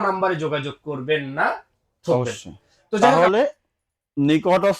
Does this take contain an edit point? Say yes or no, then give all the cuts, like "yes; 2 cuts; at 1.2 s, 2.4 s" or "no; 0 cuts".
yes; 1 cut; at 3.1 s